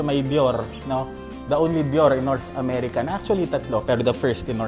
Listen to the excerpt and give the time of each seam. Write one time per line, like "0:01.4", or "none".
none